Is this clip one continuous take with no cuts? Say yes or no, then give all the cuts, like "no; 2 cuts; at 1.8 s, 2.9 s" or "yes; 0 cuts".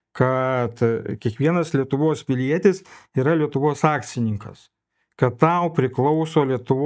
yes; 0 cuts